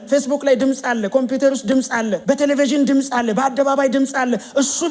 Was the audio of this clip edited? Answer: yes; 1 cut; at 2.2 s

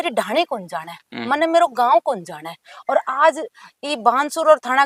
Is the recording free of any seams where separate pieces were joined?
yes; 0 cuts

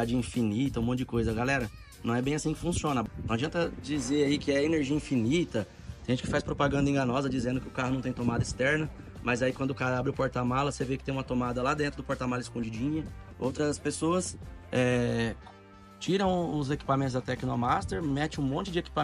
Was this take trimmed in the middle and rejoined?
yes; 2 cuts; at 3.0 s, 13.2 s

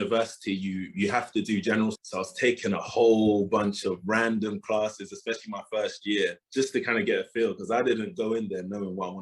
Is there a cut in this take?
no; 0 cuts

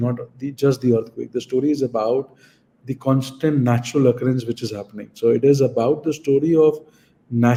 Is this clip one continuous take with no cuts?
yes; 0 cuts

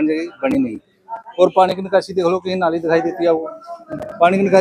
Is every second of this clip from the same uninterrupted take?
yes; 0 cuts

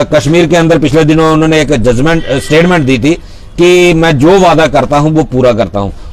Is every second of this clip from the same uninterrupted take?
yes; 0 cuts

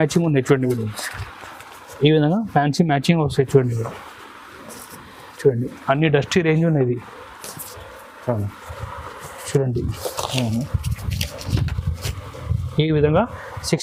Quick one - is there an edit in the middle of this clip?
no; 0 cuts

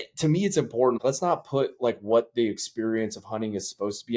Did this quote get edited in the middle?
yes; 1 cut; at 1.0 s

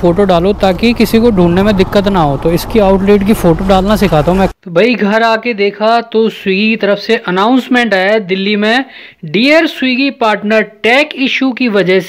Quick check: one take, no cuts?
no; 1 cut; at 4.5 s

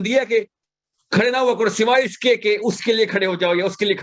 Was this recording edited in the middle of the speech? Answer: no; 0 cuts

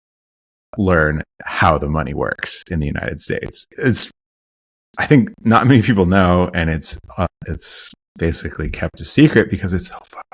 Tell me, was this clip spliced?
yes; 1 cut; at 3.6 s

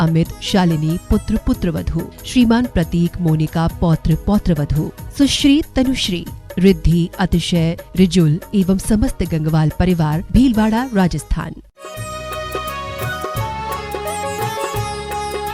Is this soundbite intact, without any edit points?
yes; 0 cuts

